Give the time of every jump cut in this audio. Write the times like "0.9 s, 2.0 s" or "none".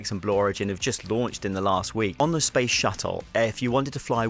2.2 s